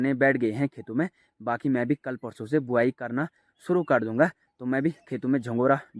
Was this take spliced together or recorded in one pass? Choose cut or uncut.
uncut